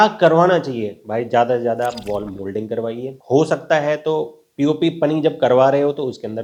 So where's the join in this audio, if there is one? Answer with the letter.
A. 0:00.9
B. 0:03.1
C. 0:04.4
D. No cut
D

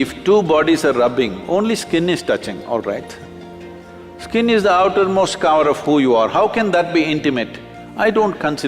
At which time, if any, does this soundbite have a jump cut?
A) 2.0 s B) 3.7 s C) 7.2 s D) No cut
D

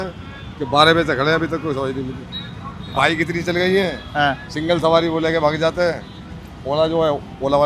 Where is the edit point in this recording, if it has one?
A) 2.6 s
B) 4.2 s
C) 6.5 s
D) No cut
D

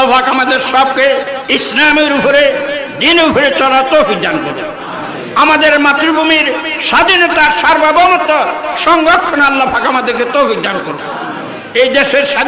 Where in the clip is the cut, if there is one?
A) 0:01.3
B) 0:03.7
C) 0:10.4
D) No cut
A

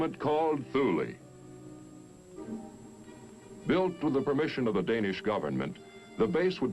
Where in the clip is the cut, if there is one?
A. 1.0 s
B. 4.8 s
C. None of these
C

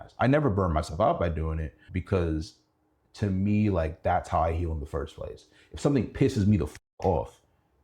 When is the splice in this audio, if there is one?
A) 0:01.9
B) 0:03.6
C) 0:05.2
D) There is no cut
A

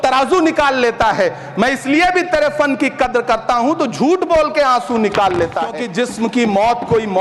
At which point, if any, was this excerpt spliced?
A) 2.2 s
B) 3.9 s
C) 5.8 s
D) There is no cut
C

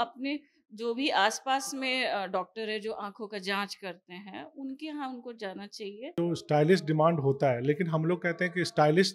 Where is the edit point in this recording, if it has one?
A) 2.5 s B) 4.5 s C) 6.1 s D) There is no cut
C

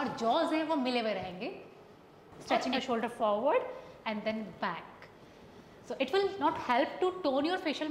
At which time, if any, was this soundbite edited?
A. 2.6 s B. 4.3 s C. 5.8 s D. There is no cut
A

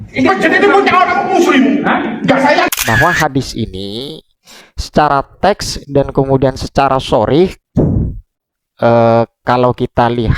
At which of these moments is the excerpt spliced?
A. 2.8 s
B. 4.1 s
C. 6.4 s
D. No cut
A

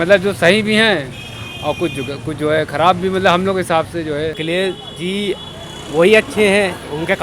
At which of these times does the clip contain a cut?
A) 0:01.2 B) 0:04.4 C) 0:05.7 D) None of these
B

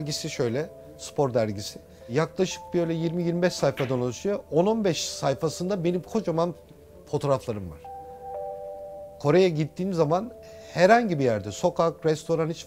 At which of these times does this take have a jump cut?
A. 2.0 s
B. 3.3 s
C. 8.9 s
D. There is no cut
A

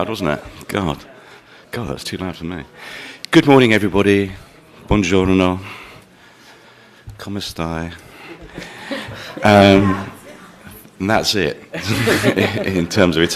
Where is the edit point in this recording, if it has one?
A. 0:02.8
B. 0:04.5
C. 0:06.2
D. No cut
D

